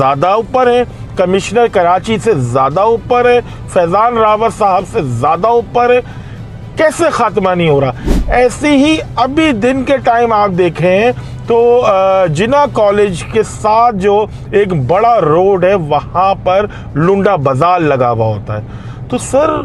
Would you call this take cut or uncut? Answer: uncut